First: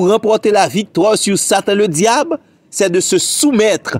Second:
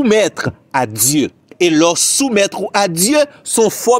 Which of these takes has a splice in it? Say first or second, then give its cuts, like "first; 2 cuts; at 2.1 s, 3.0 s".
second; 1 cut; at 1.4 s